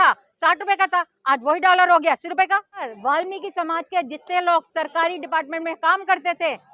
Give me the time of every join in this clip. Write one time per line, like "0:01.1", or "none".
0:02.9